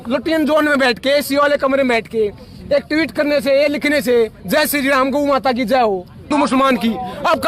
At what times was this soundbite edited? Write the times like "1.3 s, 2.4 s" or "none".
6.3 s